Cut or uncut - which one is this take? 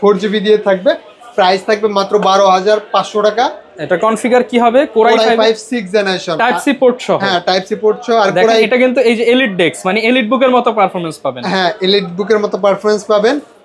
uncut